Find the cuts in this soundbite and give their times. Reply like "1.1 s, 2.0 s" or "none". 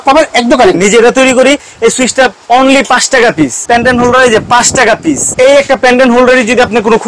0.8 s, 3.6 s, 5.3 s